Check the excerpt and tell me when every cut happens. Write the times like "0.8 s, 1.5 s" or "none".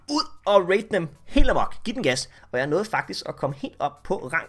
2.4 s

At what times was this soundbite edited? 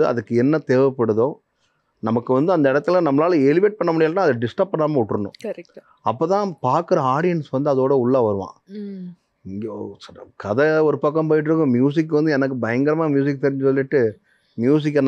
none

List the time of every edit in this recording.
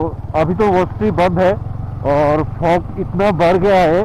none

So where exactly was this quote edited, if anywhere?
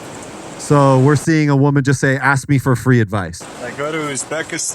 3.4 s

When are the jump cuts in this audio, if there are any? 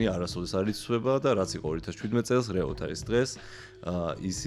none

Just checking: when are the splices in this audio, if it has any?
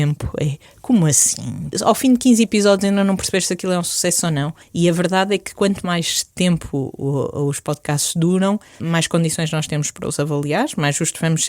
1.8 s, 4.6 s, 8.8 s

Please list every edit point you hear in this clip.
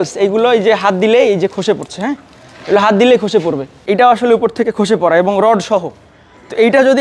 3.7 s

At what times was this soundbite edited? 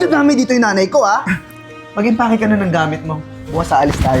1.4 s

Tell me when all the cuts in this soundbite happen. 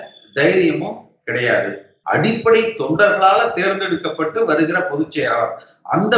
1.9 s

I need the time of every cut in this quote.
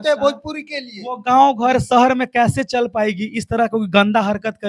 none

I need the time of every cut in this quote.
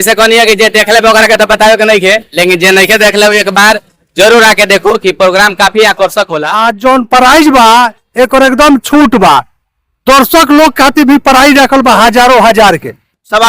6.4 s

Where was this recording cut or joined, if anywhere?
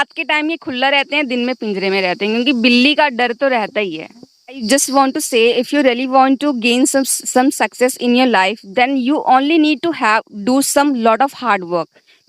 4.6 s

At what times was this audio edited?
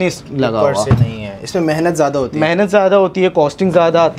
none

